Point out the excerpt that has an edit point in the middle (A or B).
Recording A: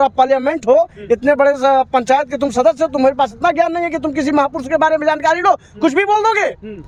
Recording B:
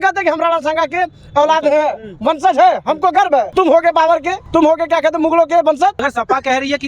B